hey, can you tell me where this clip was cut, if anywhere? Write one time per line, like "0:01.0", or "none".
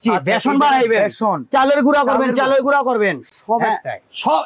none

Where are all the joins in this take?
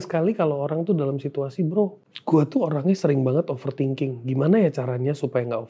0:02.1

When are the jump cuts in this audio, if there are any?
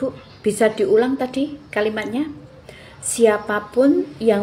none

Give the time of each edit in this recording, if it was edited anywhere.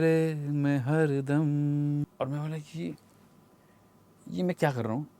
0:02.0

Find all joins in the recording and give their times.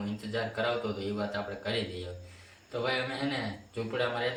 none

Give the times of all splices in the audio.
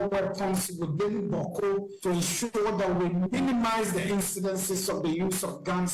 0:01.9

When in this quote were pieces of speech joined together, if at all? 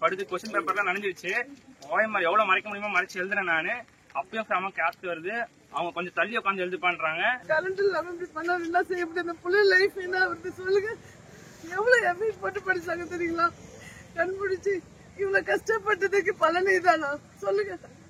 0:07.4

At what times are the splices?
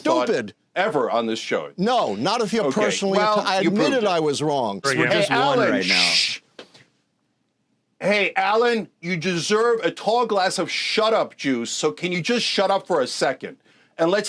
0:04.9

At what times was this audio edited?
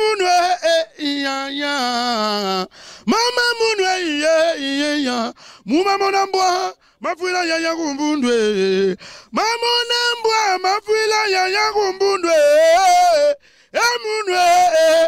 none

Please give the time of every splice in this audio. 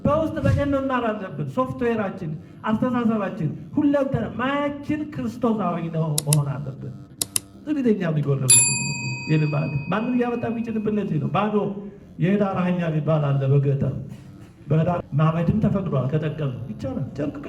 0:15.0

